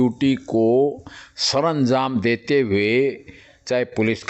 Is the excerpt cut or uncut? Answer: uncut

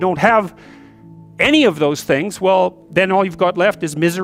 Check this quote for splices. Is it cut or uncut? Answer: uncut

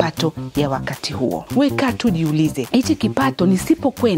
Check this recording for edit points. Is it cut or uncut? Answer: cut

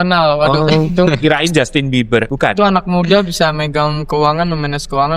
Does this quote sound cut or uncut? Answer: cut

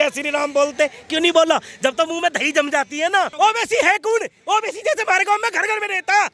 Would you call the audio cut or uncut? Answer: cut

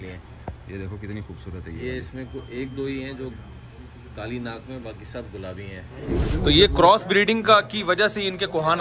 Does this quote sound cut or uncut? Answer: cut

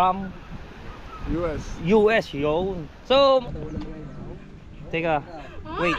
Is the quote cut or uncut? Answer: cut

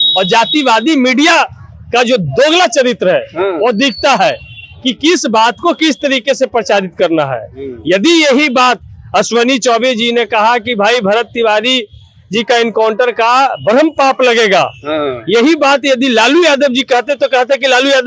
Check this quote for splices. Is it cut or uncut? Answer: uncut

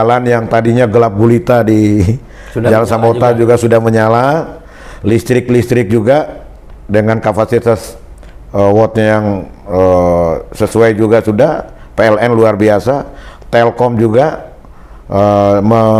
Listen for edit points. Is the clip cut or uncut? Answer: uncut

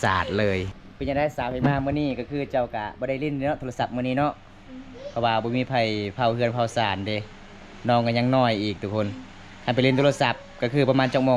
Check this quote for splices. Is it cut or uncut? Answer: cut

